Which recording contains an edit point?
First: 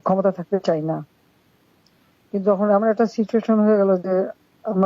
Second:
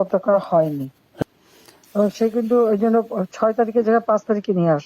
second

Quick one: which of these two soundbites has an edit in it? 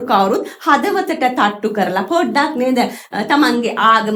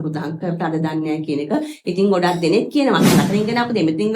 second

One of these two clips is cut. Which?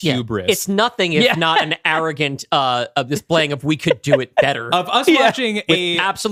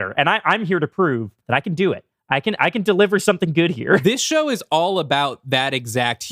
second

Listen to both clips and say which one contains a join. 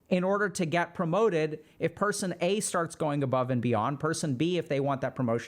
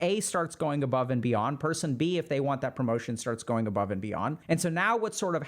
second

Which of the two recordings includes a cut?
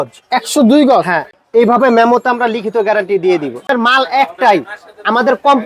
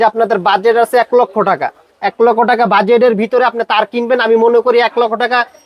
first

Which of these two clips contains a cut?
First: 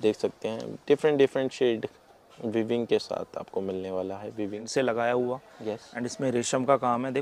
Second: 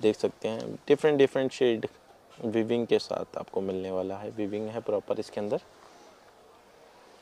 first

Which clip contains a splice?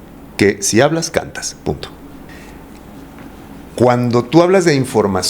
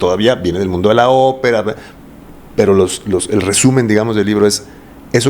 first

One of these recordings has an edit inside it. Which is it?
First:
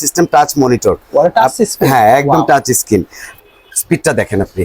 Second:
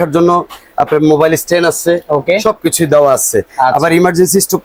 first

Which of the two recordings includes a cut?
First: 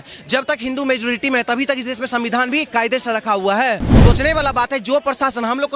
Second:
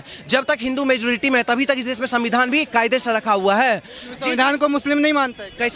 first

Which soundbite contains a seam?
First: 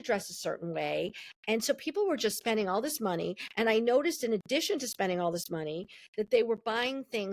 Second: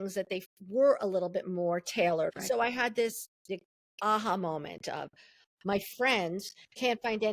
second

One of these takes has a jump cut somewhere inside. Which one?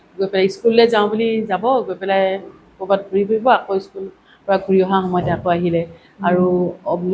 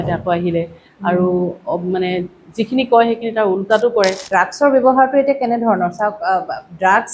second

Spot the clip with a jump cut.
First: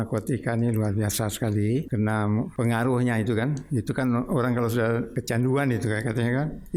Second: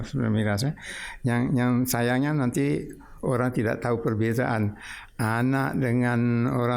first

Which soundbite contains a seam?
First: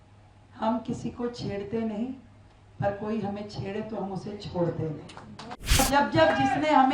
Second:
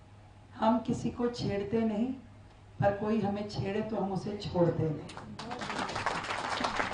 first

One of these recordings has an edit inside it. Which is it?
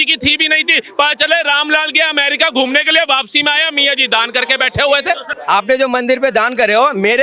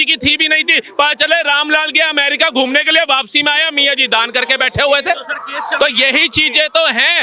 first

